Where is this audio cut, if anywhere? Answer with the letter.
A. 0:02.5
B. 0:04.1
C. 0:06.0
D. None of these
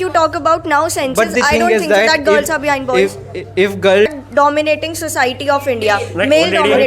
B